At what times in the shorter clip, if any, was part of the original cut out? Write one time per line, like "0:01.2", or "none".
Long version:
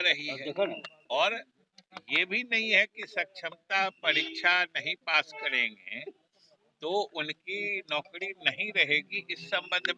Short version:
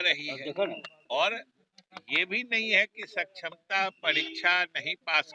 none